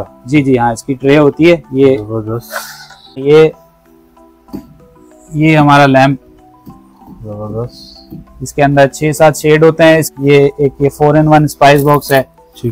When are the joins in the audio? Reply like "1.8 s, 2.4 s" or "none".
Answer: 3.2 s, 10.1 s